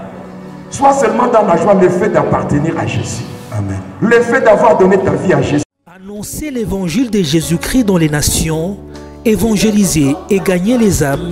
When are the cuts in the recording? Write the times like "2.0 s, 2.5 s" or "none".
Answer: 5.7 s